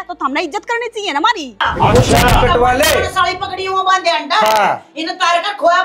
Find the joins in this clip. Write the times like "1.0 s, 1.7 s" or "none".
1.6 s